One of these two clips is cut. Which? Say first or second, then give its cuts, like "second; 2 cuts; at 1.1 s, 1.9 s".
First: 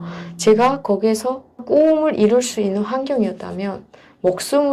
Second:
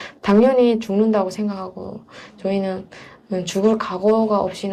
first; 1 cut; at 1.6 s